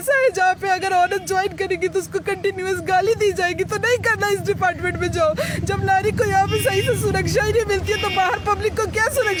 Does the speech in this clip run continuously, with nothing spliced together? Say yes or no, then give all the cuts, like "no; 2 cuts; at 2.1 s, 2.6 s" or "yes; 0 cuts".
yes; 0 cuts